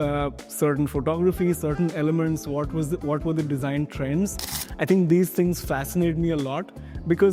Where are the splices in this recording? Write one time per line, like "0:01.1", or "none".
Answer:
none